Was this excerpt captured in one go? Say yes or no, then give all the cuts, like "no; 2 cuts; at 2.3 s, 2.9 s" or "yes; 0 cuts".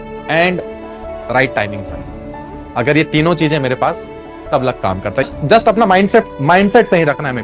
no; 2 cuts; at 5.2 s, 6.3 s